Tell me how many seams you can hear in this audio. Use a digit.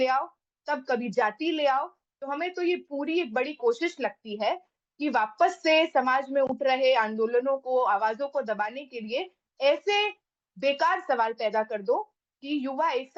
0